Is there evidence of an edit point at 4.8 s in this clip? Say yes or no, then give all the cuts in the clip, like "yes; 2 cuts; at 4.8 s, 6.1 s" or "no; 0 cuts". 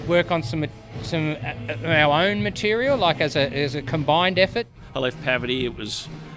yes; 1 cut; at 4.8 s